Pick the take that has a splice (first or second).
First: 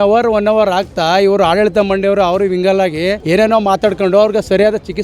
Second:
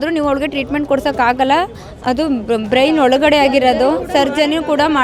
first